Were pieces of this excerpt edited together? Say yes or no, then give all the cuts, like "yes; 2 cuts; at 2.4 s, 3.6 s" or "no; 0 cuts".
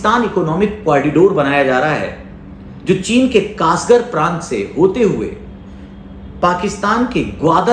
no; 0 cuts